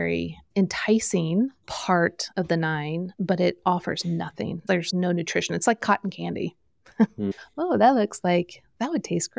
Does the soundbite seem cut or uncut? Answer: cut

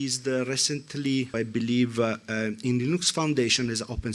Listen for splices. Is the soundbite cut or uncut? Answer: cut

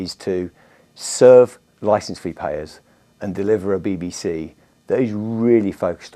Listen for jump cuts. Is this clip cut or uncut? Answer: uncut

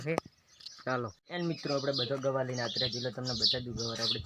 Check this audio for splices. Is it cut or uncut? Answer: uncut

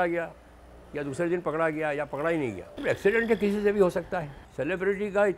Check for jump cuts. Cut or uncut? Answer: cut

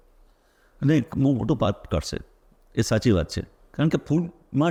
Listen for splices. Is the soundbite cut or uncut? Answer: uncut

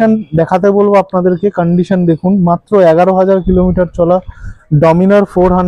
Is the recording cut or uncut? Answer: uncut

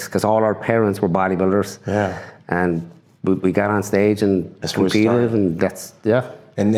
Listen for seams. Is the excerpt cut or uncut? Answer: uncut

